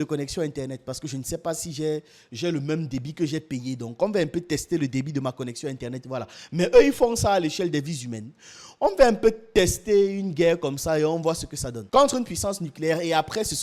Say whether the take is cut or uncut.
uncut